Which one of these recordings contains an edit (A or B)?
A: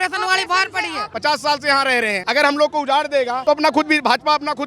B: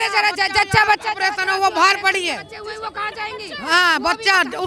A